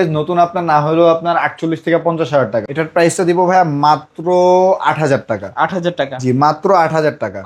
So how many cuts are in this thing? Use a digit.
1